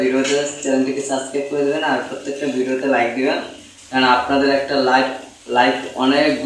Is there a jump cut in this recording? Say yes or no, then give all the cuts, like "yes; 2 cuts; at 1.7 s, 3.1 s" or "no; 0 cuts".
no; 0 cuts